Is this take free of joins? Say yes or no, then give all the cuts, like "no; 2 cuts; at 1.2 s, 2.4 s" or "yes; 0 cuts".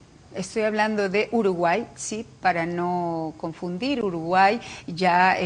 no; 1 cut; at 2.0 s